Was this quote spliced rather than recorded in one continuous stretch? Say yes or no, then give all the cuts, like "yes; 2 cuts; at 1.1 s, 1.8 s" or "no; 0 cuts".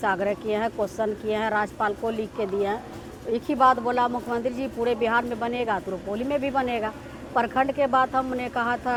no; 0 cuts